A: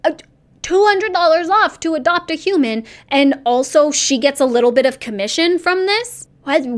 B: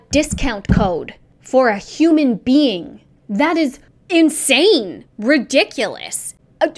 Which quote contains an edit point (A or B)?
B